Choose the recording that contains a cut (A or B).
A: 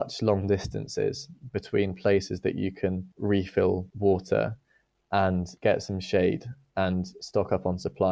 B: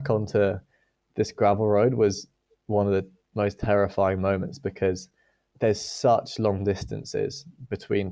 A